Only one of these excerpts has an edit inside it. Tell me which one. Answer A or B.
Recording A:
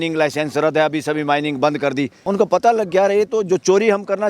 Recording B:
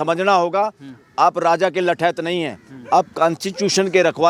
A